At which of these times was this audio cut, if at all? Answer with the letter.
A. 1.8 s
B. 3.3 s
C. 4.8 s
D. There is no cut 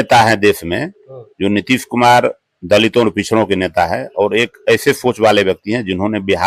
D